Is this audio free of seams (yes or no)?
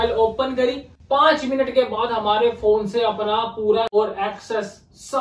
no